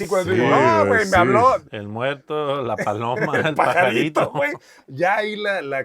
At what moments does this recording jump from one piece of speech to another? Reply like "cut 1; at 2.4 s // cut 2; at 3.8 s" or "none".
none